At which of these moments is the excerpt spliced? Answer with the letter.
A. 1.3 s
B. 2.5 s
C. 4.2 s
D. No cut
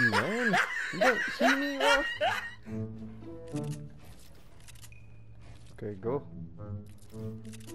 B